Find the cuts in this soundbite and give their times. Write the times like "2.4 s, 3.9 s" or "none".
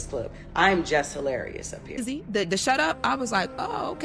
2.0 s